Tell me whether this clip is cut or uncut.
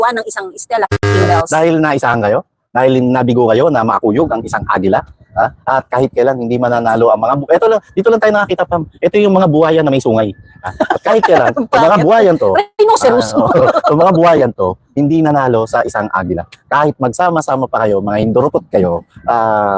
uncut